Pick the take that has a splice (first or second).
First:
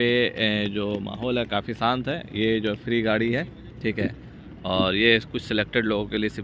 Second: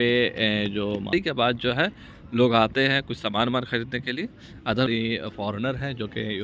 second